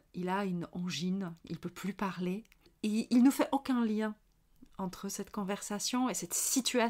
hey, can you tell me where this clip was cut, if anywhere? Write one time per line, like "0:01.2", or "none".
0:02.7